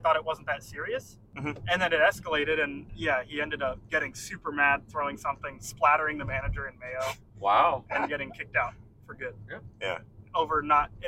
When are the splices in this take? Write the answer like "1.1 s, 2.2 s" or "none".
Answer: 1.2 s, 2.8 s, 3.8 s